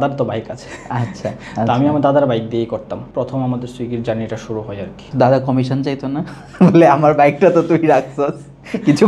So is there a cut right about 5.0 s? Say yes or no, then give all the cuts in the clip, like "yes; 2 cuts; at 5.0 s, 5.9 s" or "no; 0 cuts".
yes; 2 cuts; at 3.0 s, 5.0 s